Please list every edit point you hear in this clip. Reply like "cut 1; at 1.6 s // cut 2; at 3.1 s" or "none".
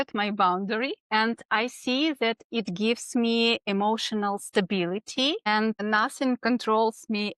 cut 1; at 1.0 s // cut 2; at 5.8 s